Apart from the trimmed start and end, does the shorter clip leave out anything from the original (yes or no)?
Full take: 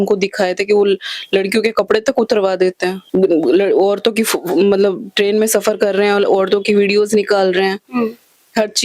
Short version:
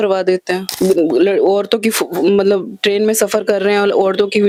no